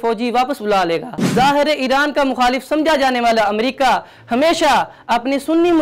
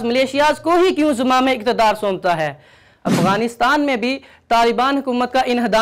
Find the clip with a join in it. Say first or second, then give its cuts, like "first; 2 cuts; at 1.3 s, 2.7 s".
first; 1 cut; at 1.2 s